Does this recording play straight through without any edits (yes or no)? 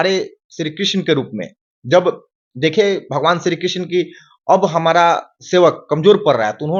yes